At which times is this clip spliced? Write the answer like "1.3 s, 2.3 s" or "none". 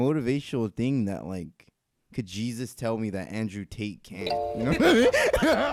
none